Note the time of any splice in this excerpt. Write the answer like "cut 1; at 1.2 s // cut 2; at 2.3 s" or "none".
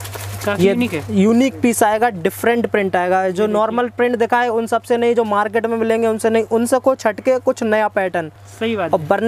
none